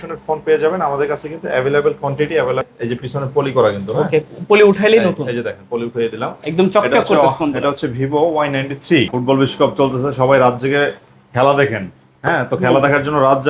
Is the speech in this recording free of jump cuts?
no; 2 cuts; at 2.6 s, 9.2 s

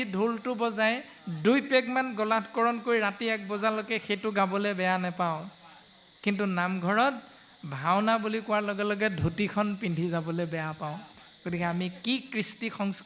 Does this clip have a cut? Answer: no; 0 cuts

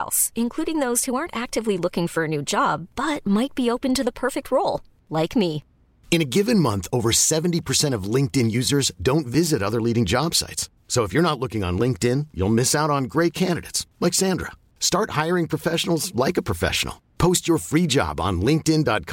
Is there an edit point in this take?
no; 0 cuts

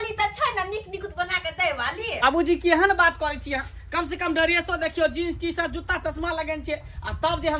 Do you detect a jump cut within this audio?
yes; 1 cut; at 2.6 s

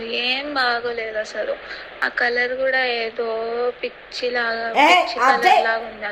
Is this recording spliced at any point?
no; 0 cuts

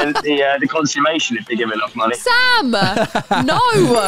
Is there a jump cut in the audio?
no; 0 cuts

